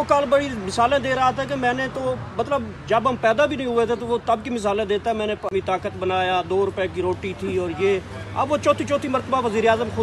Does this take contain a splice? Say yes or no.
no